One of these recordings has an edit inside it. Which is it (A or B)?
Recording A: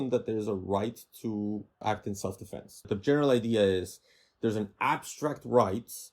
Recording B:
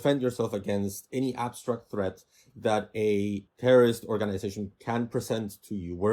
A